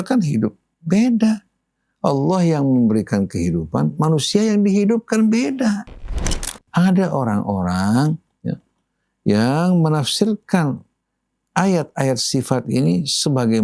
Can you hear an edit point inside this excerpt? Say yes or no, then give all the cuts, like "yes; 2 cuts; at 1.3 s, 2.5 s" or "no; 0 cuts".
yes; 1 cut; at 6.4 s